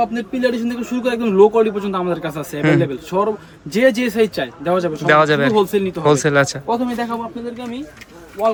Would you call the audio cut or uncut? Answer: uncut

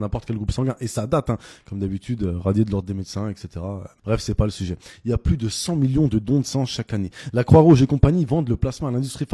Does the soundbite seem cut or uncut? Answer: cut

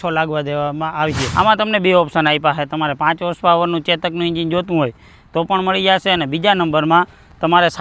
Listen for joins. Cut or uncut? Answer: cut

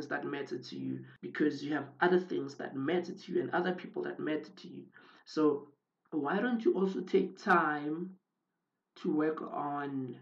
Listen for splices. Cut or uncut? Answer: uncut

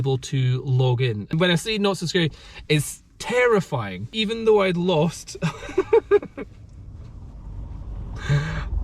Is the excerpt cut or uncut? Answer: cut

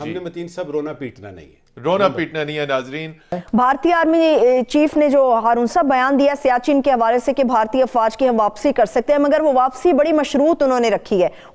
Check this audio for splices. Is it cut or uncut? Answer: uncut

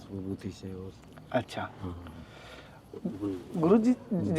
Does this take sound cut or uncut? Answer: uncut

